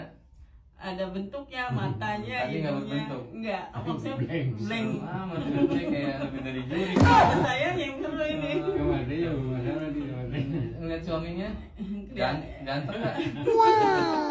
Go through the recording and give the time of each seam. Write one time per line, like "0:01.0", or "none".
none